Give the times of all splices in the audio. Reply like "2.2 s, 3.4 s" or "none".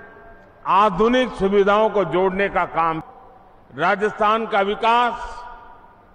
3.1 s